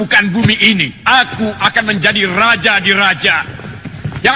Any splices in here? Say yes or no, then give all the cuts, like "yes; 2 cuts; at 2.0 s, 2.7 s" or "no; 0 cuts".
yes; 1 cut; at 1.0 s